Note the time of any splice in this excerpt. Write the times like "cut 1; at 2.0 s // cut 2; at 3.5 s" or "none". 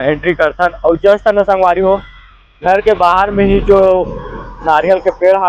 none